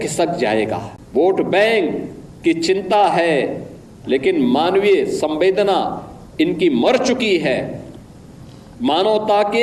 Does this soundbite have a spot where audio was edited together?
yes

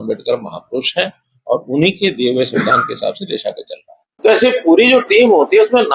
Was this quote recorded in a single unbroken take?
no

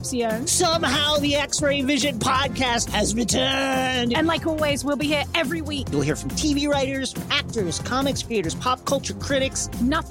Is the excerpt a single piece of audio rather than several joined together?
yes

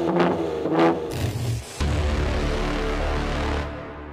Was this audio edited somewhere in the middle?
yes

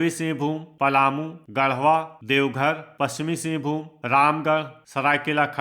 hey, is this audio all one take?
no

